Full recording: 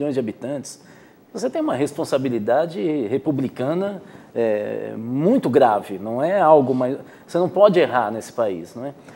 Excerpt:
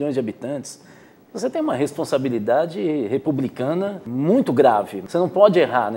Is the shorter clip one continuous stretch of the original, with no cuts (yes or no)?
no